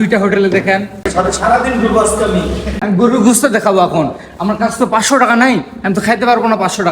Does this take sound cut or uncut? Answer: cut